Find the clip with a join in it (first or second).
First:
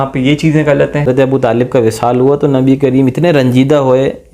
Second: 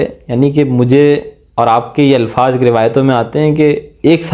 first